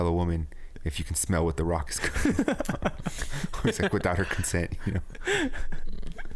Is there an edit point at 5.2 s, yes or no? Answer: no